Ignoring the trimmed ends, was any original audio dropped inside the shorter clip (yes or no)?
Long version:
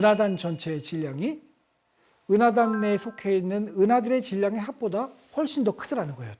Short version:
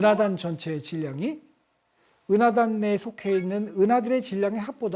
no